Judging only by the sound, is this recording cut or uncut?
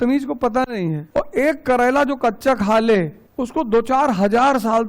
cut